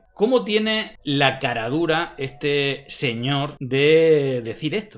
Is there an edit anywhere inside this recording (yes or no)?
yes